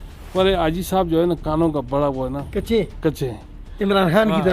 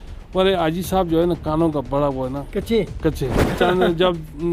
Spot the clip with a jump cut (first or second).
second